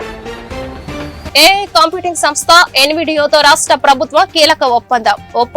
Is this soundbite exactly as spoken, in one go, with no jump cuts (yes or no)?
no